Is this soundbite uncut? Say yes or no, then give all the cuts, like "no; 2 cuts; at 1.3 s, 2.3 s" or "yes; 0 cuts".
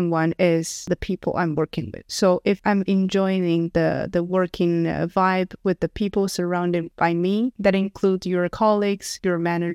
yes; 0 cuts